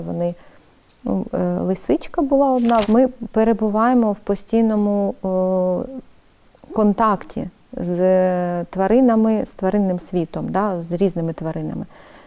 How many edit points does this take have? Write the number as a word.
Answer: one